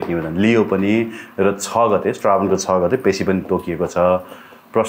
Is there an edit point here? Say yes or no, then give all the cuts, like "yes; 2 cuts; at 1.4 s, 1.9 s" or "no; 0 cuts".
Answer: no; 0 cuts